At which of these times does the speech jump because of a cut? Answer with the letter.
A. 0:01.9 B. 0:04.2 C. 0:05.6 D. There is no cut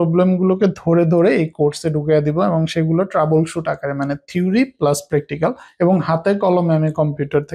C